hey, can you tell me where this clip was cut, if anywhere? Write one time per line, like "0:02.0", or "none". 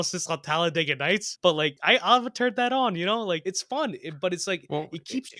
0:01.6
0:03.4